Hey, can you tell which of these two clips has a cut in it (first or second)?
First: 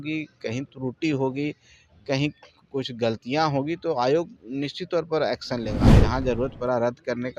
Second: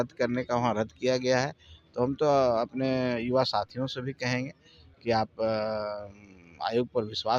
first